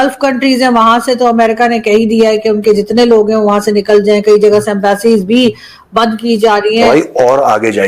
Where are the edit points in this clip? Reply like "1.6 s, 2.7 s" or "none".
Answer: 6.8 s